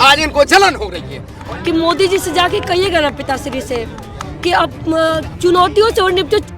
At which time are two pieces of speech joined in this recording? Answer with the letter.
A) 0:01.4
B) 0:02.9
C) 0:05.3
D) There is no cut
A